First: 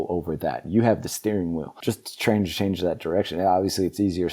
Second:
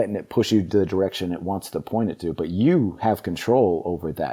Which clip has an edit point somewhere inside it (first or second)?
first